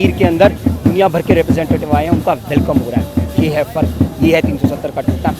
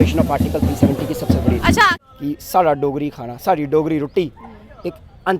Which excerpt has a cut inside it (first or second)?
second